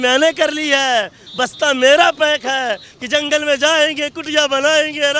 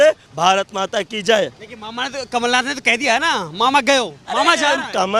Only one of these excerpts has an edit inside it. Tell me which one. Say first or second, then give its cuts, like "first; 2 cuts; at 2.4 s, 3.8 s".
first; 1 cut; at 2.9 s